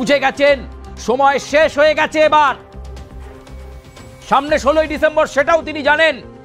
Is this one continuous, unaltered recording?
no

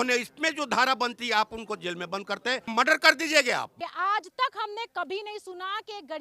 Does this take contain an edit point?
yes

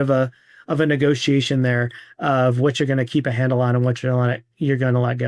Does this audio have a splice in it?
no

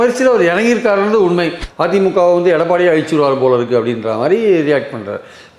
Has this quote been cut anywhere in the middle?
yes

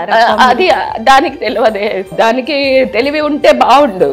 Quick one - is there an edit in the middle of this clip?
yes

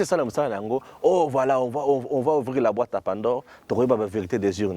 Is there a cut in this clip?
no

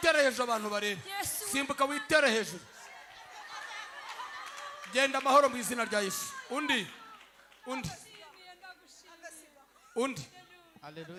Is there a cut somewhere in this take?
no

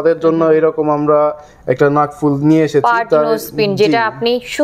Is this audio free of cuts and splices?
yes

